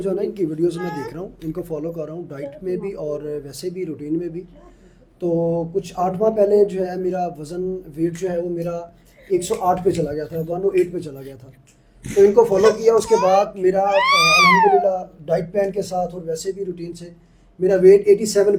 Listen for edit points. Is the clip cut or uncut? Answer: uncut